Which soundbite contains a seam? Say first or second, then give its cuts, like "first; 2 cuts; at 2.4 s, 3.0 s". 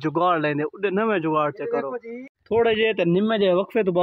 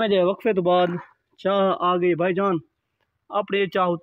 first; 1 cut; at 2.4 s